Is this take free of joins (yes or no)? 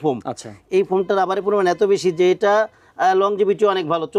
yes